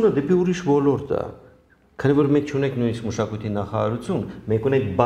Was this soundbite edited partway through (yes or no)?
no